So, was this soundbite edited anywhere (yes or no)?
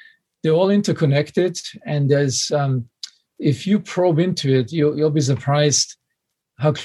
no